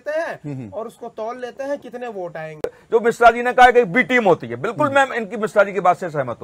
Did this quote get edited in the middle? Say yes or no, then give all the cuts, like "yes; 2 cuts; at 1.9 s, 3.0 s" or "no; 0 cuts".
yes; 1 cut; at 2.6 s